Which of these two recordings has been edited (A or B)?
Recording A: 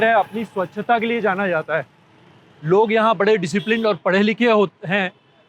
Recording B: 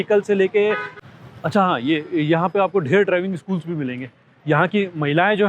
B